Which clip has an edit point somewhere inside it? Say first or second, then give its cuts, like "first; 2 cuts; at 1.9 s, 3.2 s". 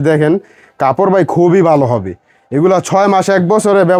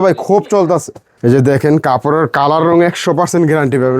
second; 1 cut; at 1.0 s